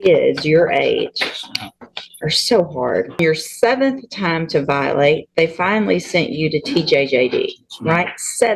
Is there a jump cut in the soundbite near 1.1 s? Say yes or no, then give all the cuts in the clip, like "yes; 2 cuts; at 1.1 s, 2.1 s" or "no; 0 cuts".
no; 1 cut; at 3.2 s